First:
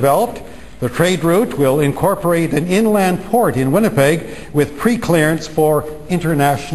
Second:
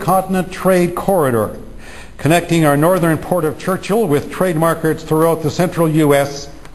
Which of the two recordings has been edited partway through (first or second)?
second